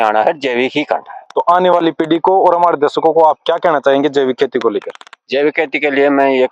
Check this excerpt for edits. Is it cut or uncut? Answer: uncut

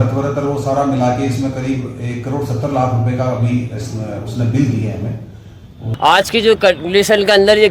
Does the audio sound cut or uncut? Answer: cut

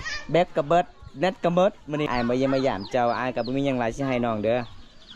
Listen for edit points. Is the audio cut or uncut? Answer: cut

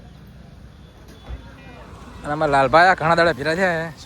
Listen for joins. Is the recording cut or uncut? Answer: uncut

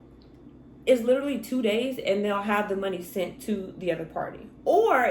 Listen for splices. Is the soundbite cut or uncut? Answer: uncut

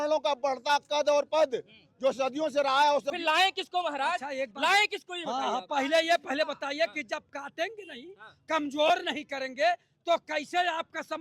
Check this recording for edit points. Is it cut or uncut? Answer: cut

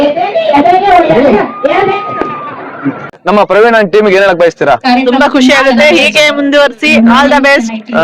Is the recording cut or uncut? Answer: cut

